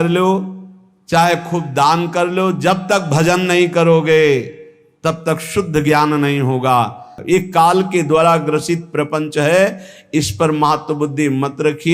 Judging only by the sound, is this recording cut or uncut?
cut